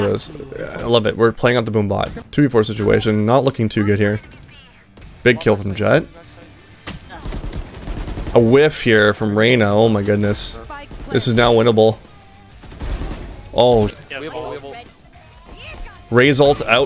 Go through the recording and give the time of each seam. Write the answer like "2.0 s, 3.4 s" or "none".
2.2 s, 14.0 s